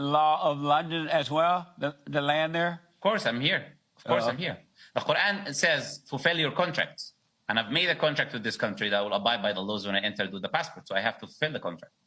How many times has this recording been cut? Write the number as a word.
zero